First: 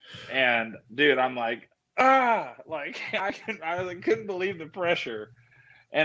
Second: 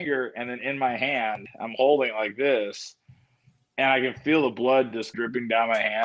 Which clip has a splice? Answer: second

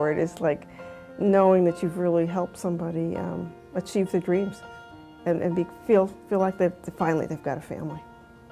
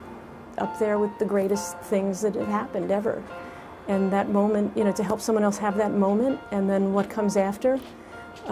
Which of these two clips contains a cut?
first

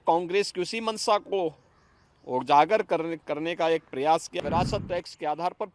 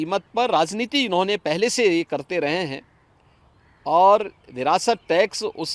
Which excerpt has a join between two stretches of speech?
first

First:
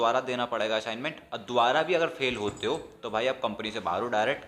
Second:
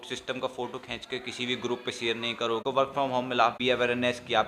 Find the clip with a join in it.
second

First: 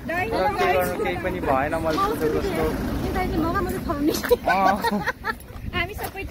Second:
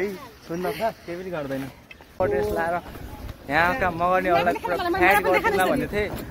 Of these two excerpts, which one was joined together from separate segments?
second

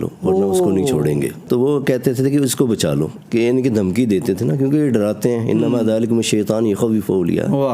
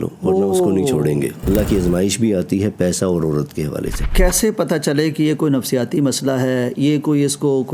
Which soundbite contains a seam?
second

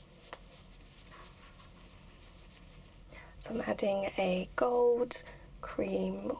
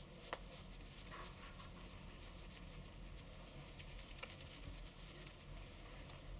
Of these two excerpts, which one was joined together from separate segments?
first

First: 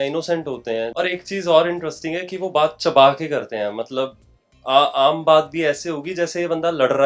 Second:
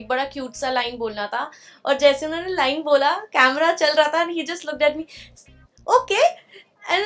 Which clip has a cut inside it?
first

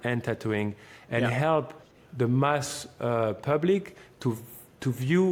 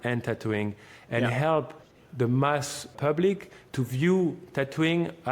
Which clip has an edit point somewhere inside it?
second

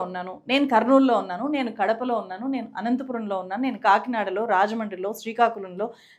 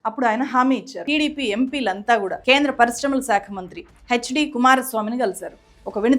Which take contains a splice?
second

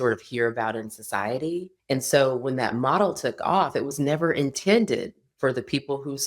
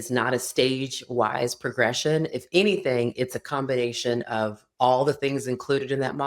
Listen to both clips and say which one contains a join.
first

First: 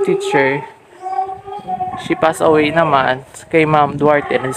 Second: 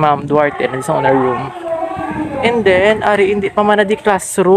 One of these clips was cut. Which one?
second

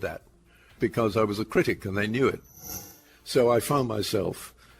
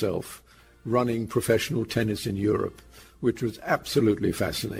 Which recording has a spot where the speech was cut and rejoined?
first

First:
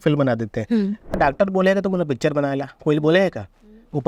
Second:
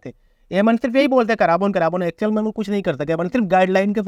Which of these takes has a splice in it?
first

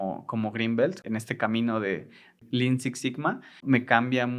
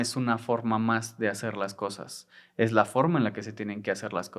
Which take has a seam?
first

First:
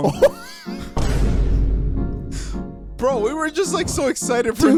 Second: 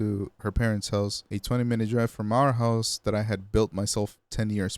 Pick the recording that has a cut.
second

